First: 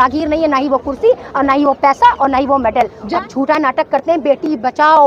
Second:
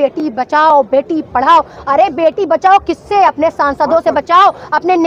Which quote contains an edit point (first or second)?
first